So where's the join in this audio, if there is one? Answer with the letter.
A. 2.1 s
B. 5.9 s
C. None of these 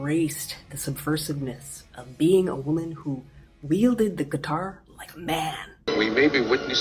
B